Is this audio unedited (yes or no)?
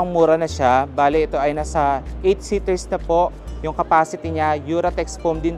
yes